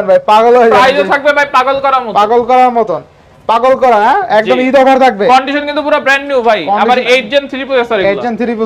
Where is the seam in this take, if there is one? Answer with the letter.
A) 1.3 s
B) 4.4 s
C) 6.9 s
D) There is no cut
D